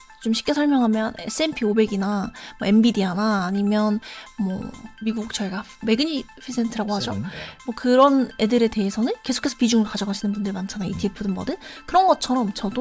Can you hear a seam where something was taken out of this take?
no; 0 cuts

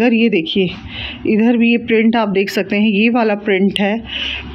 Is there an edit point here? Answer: no; 0 cuts

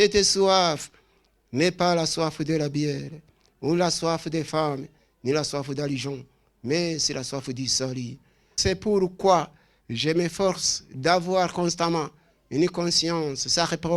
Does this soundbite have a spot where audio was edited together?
yes; 1 cut; at 8.5 s

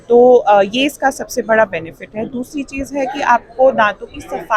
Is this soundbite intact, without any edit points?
yes; 0 cuts

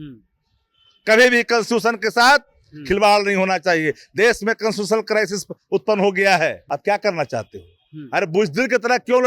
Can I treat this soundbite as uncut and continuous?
no; 1 cut; at 6.6 s

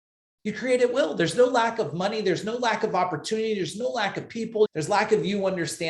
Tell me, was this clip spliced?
yes; 1 cut; at 4.7 s

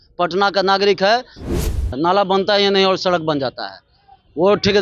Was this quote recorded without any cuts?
no; 1 cut; at 1.8 s

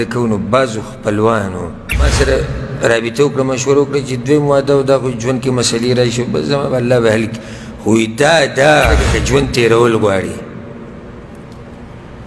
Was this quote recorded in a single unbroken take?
no; 2 cuts; at 2.1 s, 9.1 s

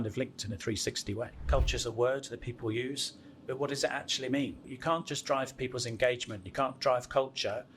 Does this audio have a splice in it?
yes; 2 cuts; at 1.5 s, 4.7 s

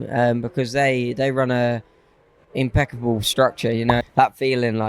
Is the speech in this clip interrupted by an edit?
yes; 1 cut; at 4.0 s

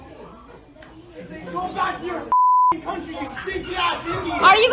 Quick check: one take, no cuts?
yes; 0 cuts

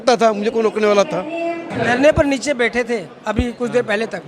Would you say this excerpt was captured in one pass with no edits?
no; 1 cut; at 1.7 s

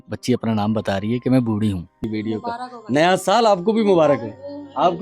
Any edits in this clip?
yes; 1 cut; at 1.9 s

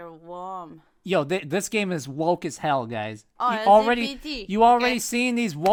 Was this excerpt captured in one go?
yes; 0 cuts

